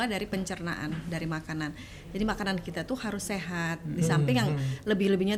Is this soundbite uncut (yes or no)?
yes